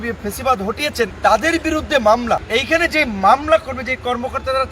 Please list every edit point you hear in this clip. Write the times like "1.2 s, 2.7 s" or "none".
1.1 s, 2.4 s